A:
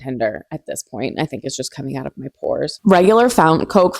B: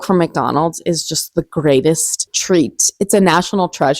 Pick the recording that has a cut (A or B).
A